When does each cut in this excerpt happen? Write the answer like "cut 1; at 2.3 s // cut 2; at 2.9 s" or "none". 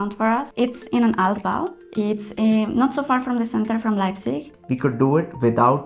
cut 1; at 4.5 s